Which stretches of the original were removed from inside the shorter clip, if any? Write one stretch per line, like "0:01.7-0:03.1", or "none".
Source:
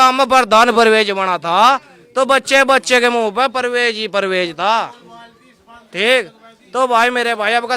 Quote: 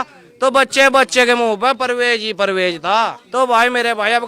0:05.0-0:06.6